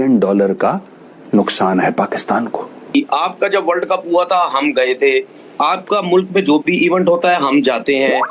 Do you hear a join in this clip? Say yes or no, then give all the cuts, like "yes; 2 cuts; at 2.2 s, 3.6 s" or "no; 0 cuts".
yes; 1 cut; at 2.9 s